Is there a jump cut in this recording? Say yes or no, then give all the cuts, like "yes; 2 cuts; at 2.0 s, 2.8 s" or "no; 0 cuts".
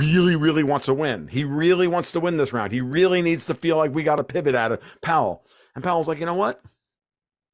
no; 0 cuts